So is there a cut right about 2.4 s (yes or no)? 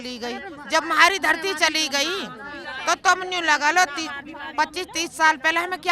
no